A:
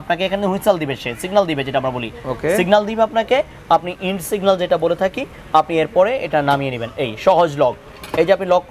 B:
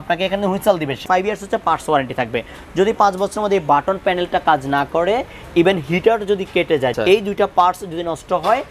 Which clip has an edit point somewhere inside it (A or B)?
B